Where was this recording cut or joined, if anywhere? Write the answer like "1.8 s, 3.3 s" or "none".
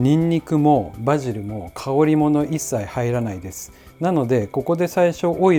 none